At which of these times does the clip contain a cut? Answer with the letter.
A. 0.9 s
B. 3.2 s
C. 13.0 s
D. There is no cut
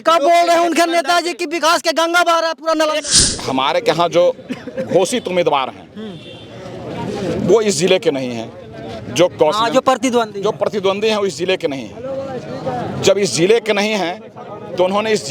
B